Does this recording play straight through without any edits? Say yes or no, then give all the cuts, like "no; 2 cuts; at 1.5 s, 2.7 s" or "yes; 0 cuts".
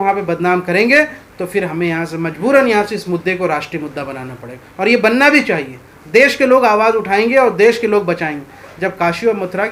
yes; 0 cuts